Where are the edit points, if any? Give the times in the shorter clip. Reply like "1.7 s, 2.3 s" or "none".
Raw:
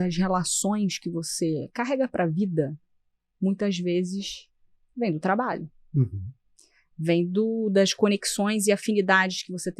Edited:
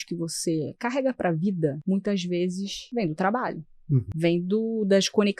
1.8 s, 2.8 s, 4.1 s